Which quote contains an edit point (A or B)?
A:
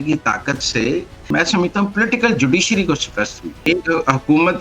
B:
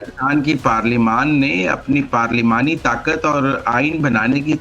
A